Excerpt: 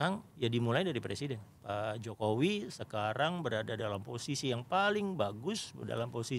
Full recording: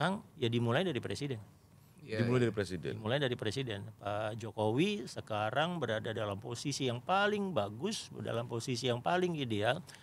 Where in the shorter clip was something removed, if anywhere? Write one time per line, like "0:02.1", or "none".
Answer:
0:01.5